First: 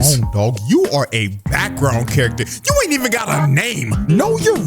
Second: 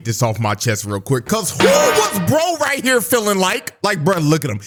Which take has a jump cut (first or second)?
first